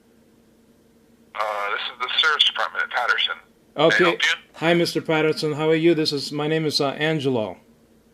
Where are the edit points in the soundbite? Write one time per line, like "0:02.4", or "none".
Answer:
0:04.8

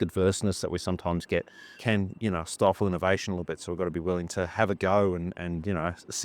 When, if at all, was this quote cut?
0:01.8

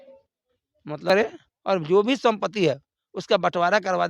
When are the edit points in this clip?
0:01.1

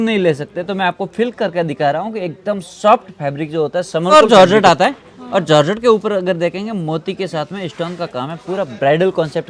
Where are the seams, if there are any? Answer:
0:04.1

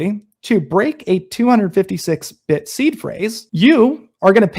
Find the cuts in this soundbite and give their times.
0:03.4

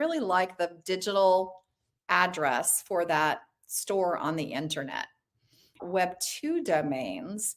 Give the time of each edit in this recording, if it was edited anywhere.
0:05.8

